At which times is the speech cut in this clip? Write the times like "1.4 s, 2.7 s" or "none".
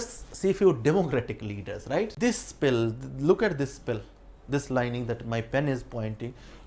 2.1 s